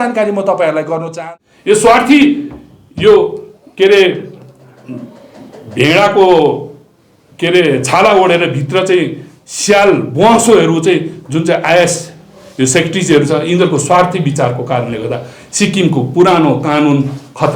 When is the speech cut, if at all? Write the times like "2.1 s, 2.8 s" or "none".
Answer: 1.1 s